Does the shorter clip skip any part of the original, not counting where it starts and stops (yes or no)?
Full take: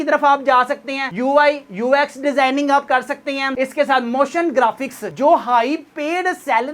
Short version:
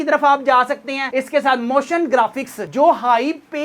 yes